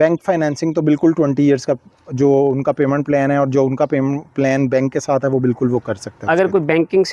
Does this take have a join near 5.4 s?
no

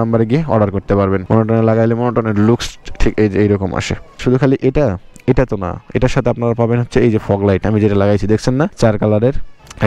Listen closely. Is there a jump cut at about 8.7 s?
yes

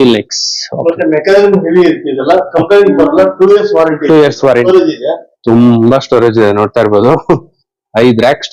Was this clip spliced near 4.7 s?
yes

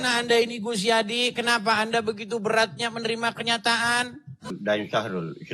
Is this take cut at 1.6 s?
no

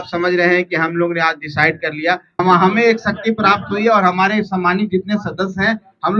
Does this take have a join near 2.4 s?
yes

